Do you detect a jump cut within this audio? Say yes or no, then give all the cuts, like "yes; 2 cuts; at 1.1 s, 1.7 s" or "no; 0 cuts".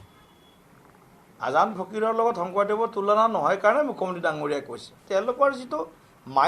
yes; 1 cut; at 4.9 s